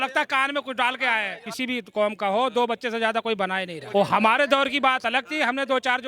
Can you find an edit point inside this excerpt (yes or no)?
yes